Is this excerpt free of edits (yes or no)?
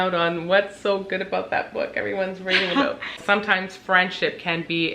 no